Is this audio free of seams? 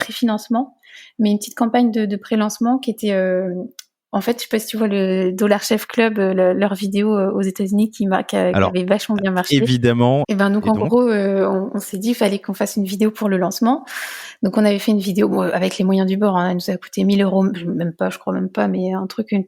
no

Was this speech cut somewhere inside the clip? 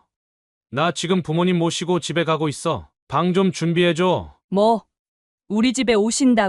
yes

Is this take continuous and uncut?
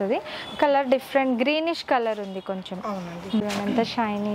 no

